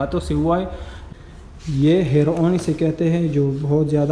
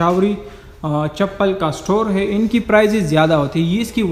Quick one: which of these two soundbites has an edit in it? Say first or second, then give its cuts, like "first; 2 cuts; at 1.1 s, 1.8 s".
first; 1 cut; at 1.0 s